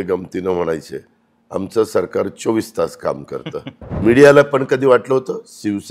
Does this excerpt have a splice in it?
yes; 1 cut; at 4.0 s

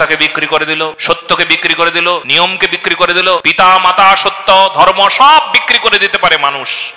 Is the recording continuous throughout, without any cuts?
no; 3 cuts; at 1.0 s, 2.3 s, 3.5 s

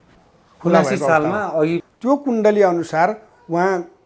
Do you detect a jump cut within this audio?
yes; 1 cut; at 1.9 s

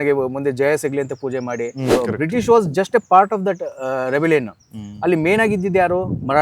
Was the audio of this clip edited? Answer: yes; 1 cut; at 1.9 s

